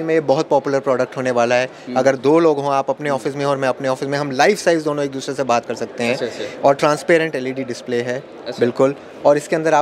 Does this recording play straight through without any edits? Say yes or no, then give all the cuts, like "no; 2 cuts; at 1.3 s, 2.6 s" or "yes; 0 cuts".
yes; 0 cuts